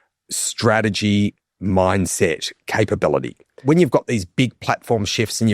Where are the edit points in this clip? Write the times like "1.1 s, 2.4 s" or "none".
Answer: 3.6 s

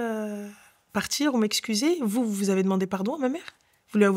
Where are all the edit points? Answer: none

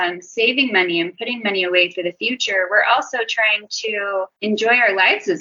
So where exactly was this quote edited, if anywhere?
none

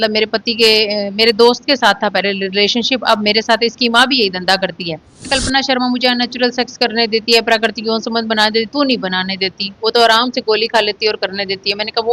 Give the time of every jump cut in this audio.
5.3 s

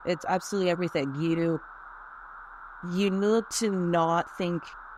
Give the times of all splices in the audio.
none

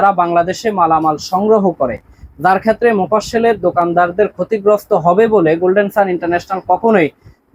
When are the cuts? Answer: none

